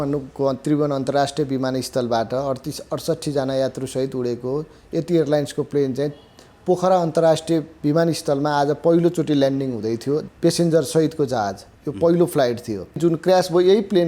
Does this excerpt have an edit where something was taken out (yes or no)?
yes